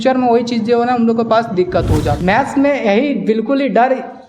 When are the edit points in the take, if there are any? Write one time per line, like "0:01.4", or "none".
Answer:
0:02.1